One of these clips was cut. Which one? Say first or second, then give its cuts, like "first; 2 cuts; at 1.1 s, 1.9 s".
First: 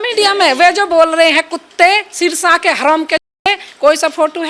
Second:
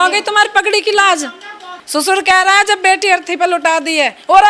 second; 1 cut; at 1.7 s